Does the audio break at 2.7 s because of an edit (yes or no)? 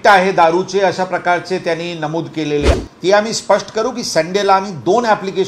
yes